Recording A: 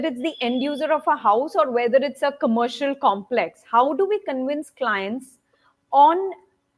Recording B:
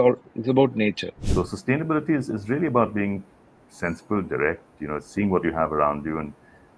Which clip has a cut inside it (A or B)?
B